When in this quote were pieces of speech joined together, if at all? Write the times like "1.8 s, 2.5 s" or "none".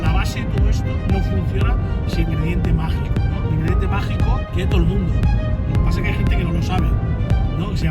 2.3 s, 4.5 s